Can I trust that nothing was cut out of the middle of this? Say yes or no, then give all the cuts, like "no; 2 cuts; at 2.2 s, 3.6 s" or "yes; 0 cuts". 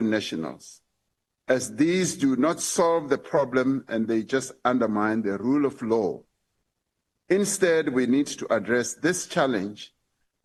yes; 0 cuts